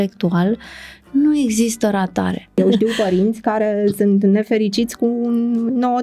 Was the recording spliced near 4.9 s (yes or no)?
no